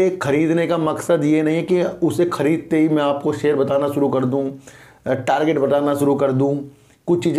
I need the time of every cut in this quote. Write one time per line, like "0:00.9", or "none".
none